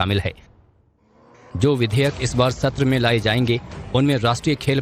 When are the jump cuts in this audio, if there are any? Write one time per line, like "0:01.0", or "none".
0:02.4